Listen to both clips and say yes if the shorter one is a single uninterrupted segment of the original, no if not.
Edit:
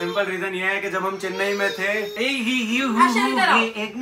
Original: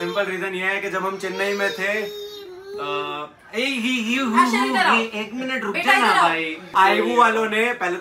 no